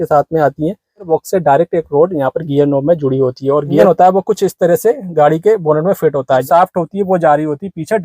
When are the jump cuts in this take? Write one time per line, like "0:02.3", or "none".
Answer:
0:01.1
0:03.8
0:06.4